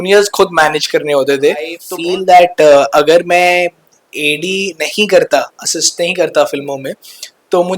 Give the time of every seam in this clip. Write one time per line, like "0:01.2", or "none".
0:01.8